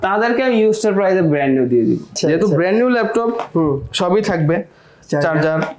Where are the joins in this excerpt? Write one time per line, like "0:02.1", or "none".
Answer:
0:02.1